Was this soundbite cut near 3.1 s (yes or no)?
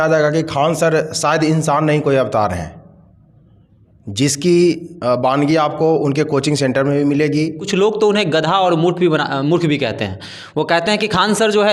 no